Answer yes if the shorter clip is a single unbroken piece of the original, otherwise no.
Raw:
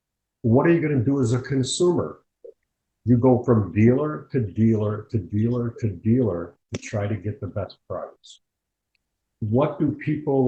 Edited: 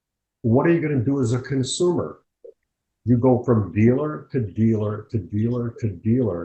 yes